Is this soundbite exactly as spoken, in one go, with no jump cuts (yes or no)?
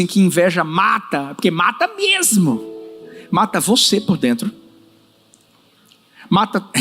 yes